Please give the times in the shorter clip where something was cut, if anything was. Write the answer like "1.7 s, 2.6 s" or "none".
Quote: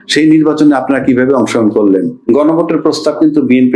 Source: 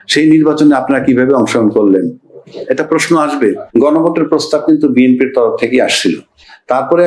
2.2 s